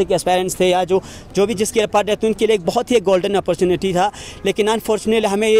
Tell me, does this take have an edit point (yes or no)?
no